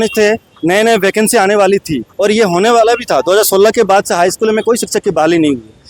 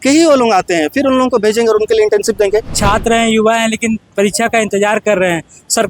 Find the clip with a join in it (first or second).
second